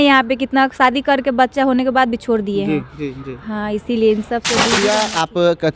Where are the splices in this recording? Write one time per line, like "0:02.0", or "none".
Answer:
0:04.7